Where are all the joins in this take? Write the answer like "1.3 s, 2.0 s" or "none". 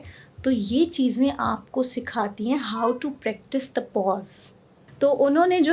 4.8 s

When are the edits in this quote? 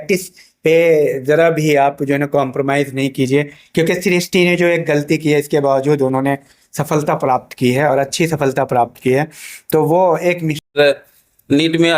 10.7 s

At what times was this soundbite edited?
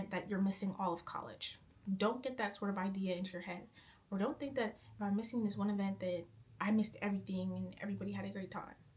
none

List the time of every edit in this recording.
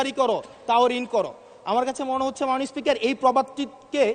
none

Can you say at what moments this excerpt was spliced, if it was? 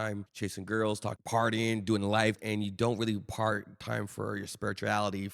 2.4 s

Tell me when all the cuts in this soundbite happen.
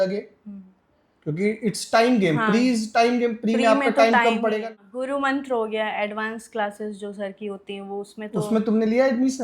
4.7 s

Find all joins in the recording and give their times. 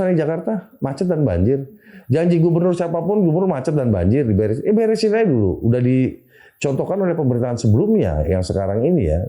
none

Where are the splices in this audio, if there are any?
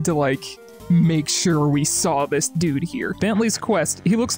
3.2 s

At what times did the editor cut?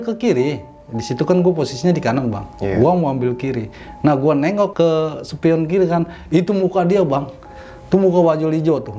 4.7 s

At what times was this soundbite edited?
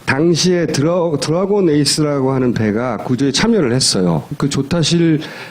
2.7 s

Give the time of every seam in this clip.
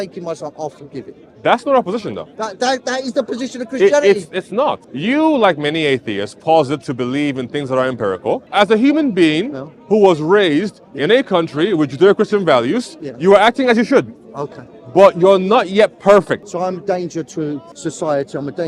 4.8 s, 8.5 s, 16.5 s, 17.7 s

